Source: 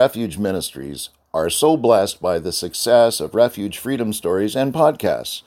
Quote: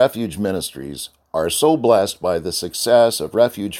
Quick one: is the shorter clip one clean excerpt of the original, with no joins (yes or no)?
yes